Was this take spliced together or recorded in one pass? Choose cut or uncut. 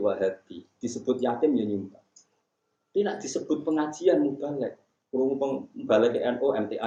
uncut